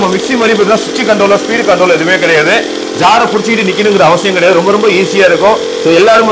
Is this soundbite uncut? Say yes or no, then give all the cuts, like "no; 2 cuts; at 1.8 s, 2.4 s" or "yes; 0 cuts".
yes; 0 cuts